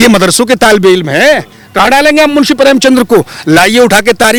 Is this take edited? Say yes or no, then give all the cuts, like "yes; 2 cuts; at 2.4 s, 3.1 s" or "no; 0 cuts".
no; 0 cuts